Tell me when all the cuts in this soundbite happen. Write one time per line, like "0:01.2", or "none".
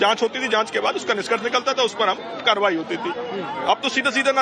none